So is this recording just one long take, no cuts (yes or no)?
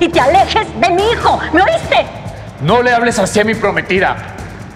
yes